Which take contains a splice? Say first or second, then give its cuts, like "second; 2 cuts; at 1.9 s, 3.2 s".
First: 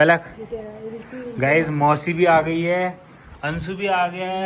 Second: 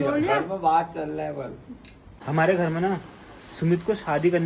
second; 1 cut; at 2.2 s